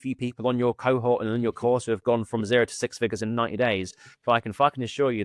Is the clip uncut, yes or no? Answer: yes